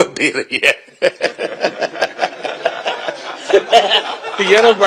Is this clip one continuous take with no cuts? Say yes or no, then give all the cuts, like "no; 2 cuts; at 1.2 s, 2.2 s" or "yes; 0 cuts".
yes; 0 cuts